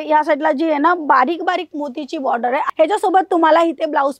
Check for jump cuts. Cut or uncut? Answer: cut